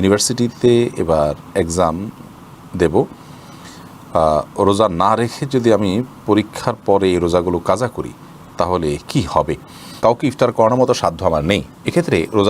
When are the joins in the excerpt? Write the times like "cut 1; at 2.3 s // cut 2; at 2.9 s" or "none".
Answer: cut 1; at 10.0 s